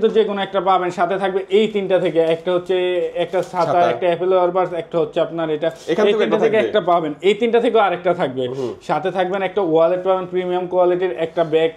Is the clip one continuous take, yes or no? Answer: yes